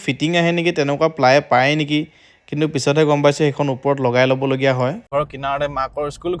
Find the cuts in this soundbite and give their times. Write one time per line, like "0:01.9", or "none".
0:05.0